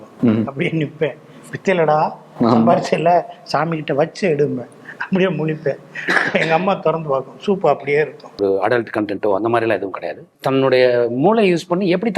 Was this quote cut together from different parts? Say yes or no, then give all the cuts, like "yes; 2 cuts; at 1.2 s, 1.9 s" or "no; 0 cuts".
yes; 2 cuts; at 8.4 s, 10.3 s